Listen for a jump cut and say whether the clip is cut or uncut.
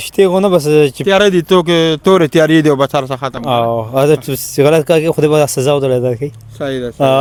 uncut